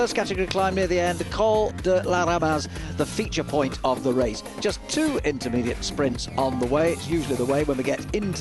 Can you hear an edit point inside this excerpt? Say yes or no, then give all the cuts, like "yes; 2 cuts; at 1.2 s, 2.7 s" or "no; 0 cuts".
yes; 1 cut; at 3.2 s